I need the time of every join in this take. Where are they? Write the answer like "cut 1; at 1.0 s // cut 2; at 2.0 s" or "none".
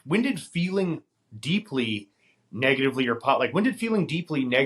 none